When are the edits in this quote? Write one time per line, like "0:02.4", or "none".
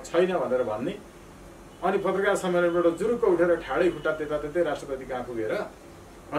none

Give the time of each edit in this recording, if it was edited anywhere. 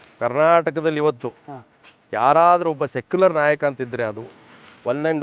none

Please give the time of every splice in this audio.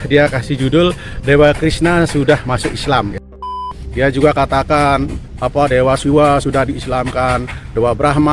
0:03.6

